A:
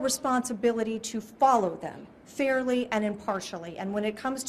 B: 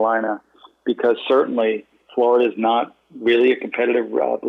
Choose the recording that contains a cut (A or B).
B